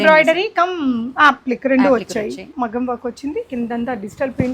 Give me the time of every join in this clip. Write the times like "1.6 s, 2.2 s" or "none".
2.5 s